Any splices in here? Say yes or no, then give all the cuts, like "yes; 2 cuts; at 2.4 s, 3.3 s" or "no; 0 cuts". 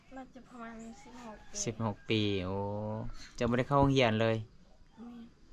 no; 0 cuts